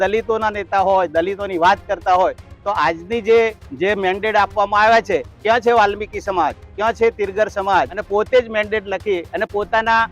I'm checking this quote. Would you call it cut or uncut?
cut